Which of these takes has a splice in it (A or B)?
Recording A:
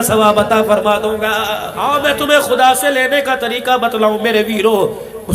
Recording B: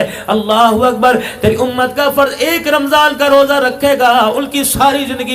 A